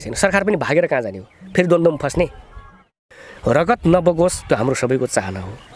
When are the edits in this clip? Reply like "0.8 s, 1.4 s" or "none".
2.9 s